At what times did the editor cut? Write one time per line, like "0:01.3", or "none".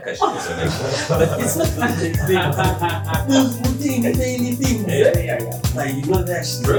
none